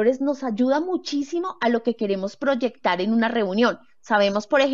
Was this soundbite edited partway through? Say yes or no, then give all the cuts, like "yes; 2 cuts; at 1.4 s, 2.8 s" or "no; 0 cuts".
no; 0 cuts